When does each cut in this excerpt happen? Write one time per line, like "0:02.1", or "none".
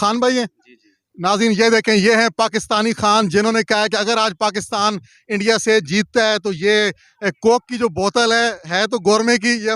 none

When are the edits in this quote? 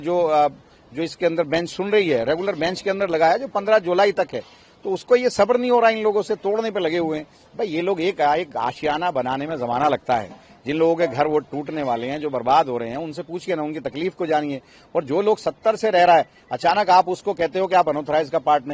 none

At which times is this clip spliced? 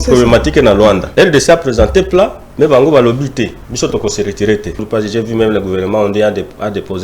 0:01.0
0:03.6
0:04.8

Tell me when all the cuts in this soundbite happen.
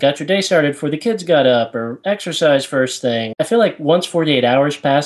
0:03.3

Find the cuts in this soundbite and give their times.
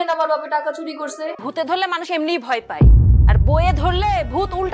0:01.4

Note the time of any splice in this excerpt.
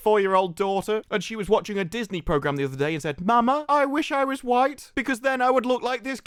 none

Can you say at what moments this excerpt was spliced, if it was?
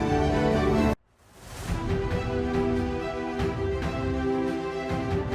0:00.9

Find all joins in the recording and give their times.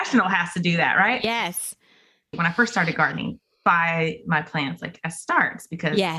0:02.3

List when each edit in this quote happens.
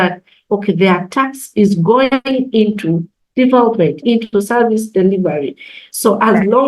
0:04.0

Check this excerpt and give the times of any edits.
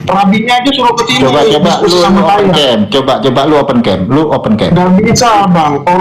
none

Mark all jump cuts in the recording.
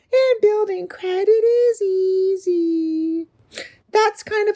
none

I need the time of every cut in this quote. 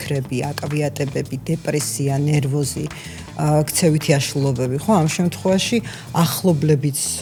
none

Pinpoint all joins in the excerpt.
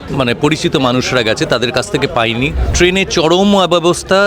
0:02.6

